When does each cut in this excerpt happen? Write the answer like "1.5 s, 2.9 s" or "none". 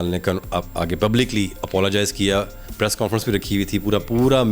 2.6 s

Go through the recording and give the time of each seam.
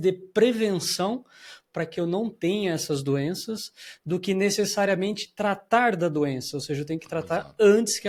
none

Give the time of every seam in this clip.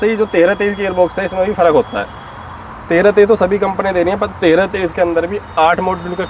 none

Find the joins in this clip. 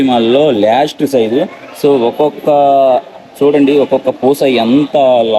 none

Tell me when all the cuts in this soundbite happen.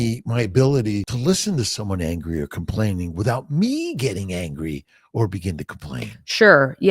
1.1 s

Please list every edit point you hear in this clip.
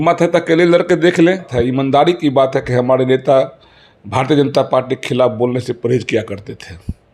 1.5 s

